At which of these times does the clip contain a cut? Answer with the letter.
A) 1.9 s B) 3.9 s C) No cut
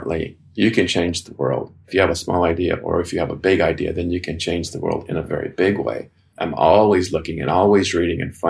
A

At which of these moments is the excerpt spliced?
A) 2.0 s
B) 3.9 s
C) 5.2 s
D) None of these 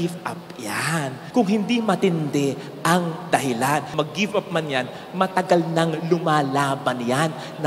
B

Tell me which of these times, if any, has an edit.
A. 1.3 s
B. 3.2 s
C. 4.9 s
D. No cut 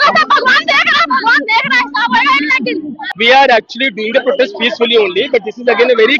D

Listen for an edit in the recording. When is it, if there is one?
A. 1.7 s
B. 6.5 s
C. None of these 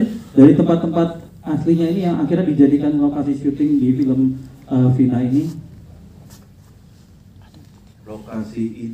C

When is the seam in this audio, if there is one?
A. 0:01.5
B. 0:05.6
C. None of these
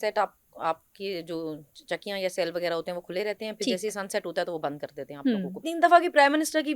B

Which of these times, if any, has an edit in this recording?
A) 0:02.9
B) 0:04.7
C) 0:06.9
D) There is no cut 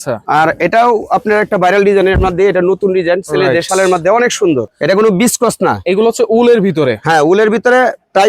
B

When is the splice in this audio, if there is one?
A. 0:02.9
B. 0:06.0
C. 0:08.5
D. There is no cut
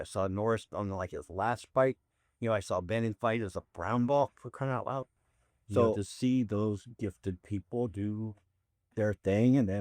B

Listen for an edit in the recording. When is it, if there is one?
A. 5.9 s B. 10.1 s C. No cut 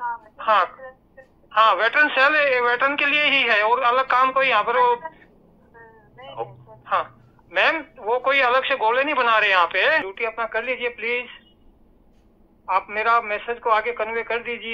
B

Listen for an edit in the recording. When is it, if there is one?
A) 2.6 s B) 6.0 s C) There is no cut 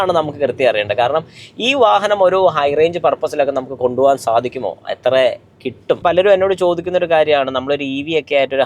B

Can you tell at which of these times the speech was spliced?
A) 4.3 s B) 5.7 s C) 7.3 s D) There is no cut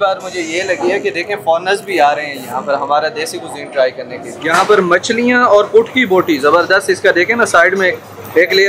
A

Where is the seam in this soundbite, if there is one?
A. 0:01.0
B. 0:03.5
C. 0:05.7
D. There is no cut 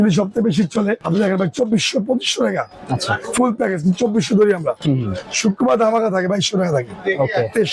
A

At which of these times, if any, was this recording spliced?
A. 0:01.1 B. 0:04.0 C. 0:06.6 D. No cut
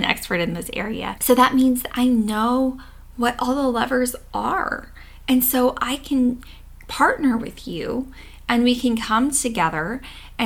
A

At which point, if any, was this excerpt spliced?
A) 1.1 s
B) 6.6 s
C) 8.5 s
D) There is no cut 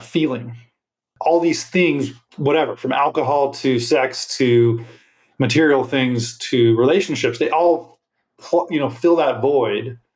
A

